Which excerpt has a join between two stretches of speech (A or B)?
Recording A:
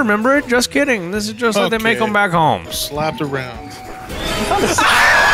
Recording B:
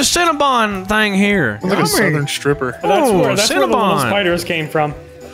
A